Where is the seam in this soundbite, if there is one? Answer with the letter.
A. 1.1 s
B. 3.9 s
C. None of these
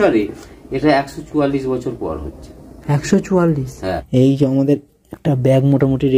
B